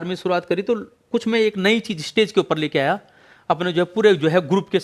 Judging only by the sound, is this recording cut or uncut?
uncut